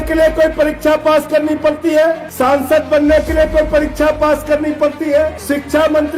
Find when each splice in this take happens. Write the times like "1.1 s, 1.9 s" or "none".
2.3 s, 5.4 s